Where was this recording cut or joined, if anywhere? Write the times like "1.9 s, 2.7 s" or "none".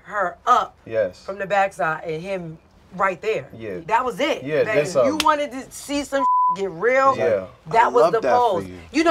3.8 s